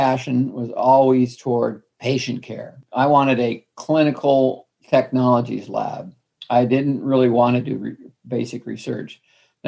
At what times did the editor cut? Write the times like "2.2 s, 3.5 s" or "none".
1.9 s, 4.7 s